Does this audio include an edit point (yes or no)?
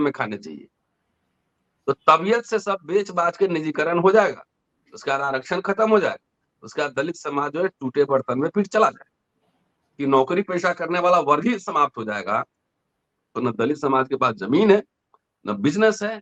no